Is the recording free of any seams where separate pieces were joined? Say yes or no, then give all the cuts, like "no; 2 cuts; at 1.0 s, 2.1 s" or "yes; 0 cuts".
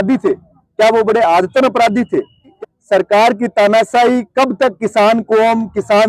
no; 1 cut; at 2.5 s